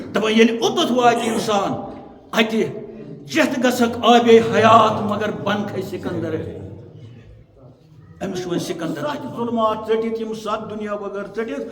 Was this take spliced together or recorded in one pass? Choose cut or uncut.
cut